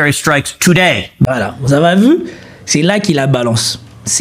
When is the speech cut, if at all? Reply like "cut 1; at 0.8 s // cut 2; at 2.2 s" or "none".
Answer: cut 1; at 1.1 s

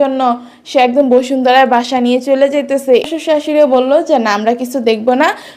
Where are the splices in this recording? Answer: cut 1; at 3.1 s

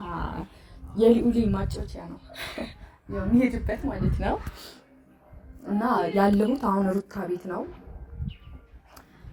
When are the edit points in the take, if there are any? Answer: none

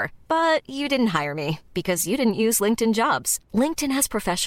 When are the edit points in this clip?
none

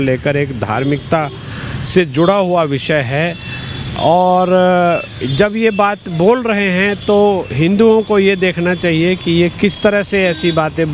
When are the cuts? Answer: none

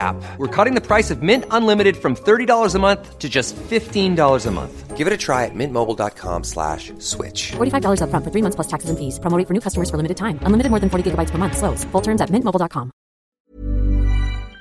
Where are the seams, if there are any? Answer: cut 1; at 13.2 s

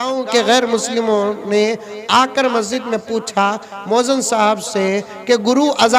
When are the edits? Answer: none

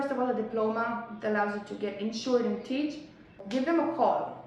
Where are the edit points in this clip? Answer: cut 1; at 3.4 s

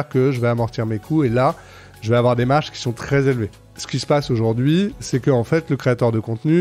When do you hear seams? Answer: cut 1; at 3.7 s // cut 2; at 5.0 s

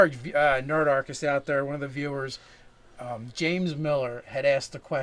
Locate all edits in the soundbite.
cut 1; at 3.2 s

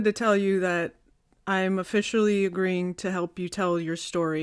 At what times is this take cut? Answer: none

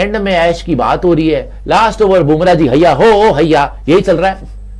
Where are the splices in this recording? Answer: none

